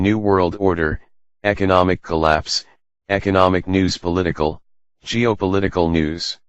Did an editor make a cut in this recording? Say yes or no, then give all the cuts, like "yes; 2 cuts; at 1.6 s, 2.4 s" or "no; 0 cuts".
yes; 1 cut; at 4.2 s